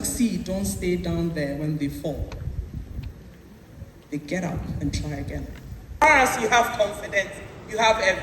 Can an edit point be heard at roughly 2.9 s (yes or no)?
no